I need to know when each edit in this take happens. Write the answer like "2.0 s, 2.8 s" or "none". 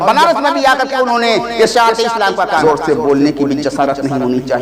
2.6 s